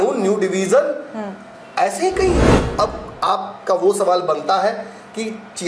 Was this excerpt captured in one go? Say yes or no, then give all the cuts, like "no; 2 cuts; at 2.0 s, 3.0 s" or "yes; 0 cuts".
no; 1 cut; at 2.6 s